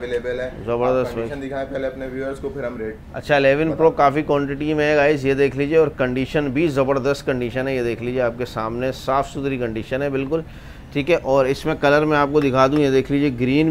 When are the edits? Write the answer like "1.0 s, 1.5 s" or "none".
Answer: none